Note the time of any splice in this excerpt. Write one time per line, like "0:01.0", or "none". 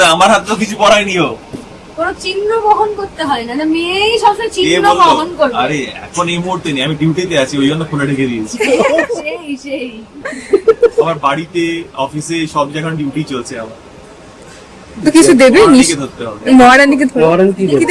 none